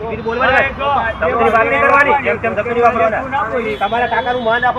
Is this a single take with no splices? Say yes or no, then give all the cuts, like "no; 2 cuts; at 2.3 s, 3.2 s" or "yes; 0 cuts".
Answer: yes; 0 cuts